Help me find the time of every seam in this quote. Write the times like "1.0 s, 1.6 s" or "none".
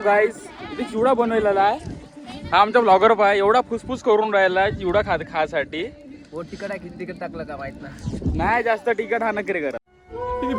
none

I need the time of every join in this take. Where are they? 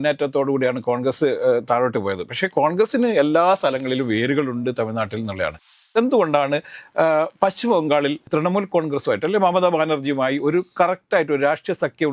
5.8 s, 8.2 s

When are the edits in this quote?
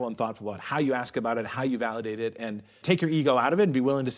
none

